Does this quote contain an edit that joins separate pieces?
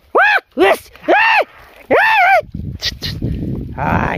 no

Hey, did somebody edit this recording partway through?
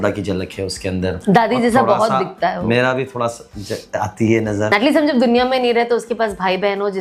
yes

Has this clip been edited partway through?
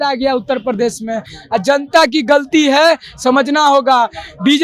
no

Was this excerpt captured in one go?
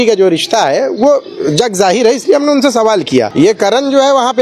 no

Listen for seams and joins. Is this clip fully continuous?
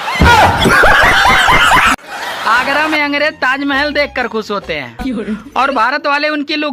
no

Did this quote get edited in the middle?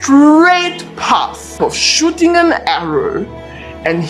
yes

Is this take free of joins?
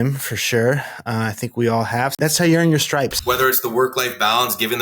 no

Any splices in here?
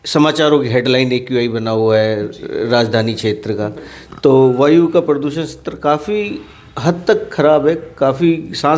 no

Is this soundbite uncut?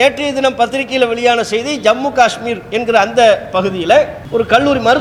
yes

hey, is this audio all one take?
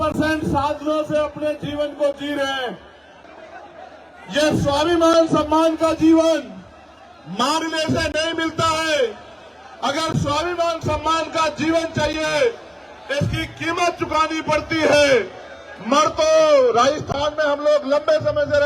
no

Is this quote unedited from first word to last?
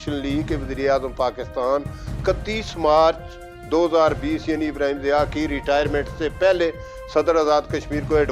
yes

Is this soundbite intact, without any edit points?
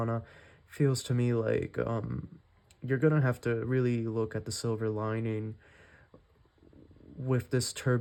yes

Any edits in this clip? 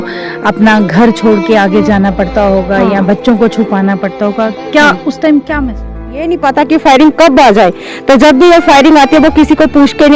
yes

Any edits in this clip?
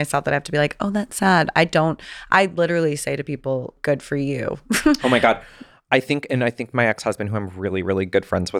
no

